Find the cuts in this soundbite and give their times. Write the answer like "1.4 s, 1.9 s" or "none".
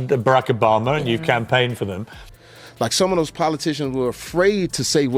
2.3 s